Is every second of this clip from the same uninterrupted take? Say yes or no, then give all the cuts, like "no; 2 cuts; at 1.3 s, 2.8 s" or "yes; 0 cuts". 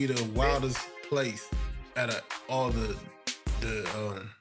yes; 0 cuts